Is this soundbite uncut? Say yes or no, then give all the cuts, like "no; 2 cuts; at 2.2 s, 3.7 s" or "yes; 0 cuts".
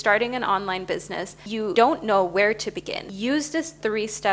no; 2 cuts; at 1.6 s, 3.0 s